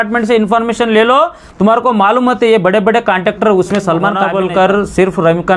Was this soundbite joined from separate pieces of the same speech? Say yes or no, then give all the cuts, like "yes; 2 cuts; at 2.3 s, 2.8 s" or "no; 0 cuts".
yes; 1 cut; at 4.2 s